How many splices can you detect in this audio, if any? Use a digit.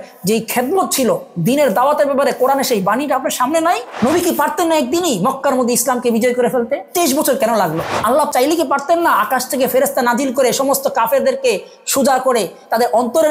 1